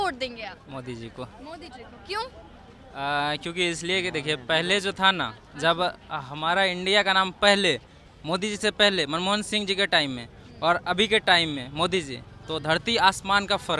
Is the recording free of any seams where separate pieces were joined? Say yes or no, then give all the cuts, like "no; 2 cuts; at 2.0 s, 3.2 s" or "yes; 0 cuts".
yes; 0 cuts